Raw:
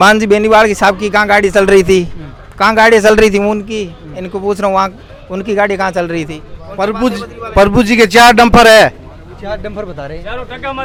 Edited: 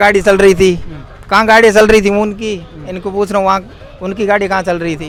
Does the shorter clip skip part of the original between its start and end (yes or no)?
no